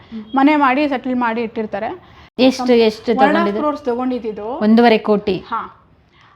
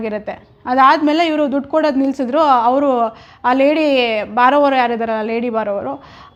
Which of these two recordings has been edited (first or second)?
first